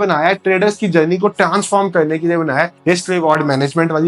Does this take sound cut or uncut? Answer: cut